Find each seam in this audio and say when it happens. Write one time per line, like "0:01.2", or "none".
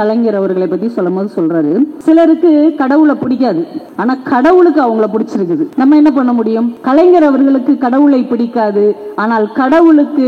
0:02.0
0:03.8
0:05.7
0:06.8